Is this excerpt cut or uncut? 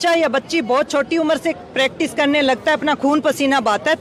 uncut